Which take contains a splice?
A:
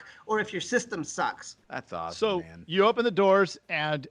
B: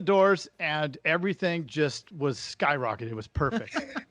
A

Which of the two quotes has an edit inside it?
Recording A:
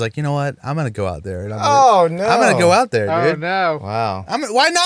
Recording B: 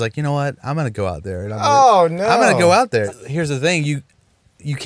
B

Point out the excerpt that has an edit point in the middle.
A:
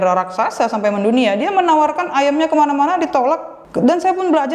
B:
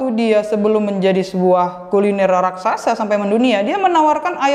A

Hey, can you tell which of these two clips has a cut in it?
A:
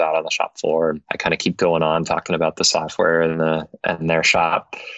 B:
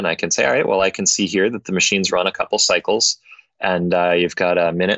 A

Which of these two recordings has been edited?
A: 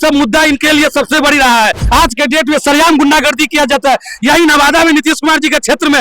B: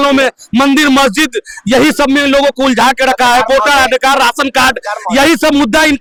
A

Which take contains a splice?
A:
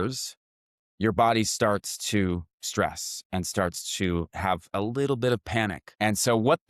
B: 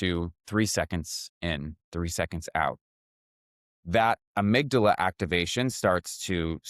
A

